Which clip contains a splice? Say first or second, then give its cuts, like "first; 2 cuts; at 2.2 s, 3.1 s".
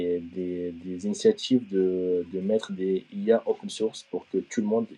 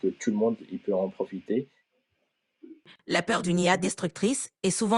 second; 1 cut; at 1.8 s